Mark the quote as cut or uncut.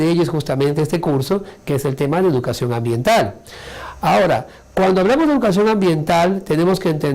cut